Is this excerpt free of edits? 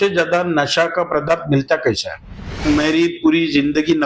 no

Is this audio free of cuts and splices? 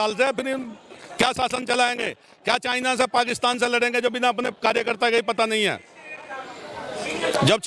yes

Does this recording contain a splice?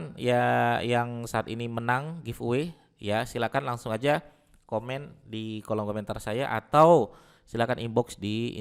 no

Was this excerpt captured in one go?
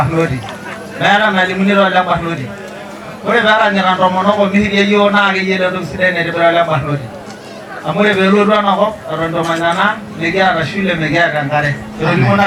yes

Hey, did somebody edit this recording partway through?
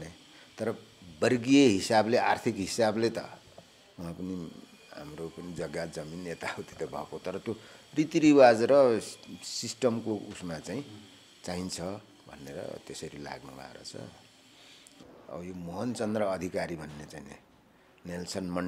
yes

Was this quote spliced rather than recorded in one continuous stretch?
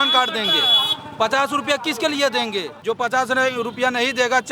yes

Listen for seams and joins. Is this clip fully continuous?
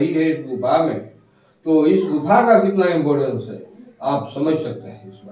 yes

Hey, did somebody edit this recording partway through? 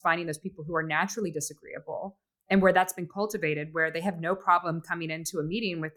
no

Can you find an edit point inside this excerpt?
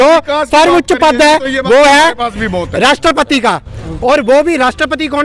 no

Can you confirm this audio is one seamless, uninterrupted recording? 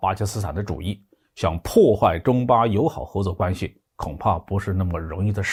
yes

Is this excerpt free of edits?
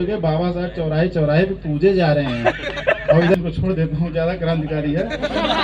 no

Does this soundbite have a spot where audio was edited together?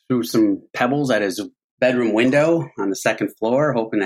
no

